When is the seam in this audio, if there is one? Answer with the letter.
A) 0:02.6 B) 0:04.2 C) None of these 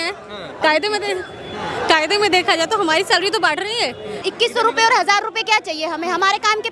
B